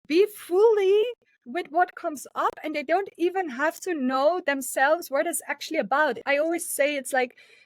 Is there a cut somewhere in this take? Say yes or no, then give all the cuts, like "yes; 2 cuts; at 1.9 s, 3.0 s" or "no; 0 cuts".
yes; 1 cut; at 6.2 s